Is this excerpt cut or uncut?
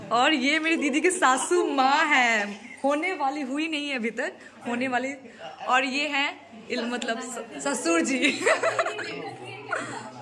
uncut